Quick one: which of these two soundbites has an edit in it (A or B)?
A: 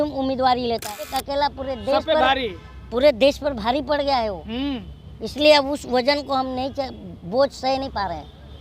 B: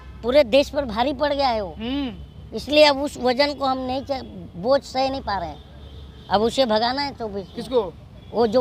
A